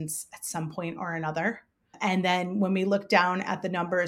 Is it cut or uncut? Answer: cut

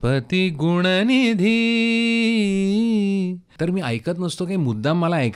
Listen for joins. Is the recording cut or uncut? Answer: cut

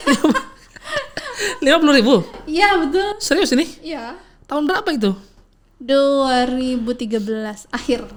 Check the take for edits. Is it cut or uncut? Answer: uncut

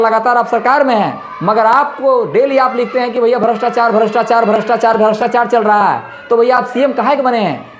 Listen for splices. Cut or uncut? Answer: uncut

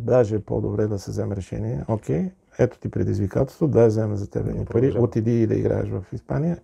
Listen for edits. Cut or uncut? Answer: uncut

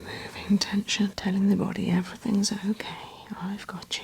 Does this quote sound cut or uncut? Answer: cut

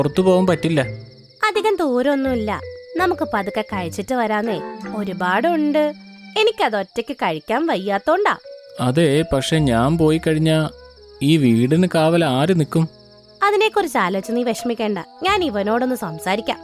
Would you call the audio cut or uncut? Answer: uncut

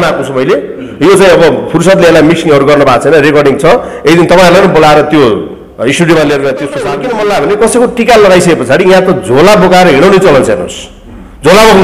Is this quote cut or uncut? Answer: cut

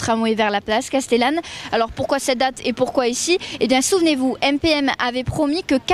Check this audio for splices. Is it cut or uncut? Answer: uncut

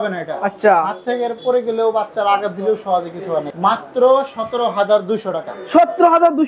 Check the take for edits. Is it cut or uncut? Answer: cut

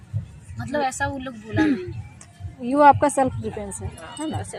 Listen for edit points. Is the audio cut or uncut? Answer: uncut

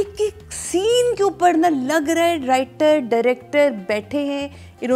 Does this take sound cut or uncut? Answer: uncut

